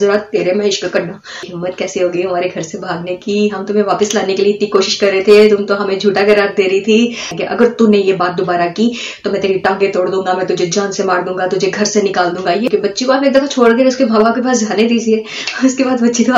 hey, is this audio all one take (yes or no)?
no